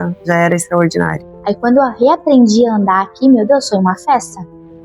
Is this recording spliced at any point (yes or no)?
yes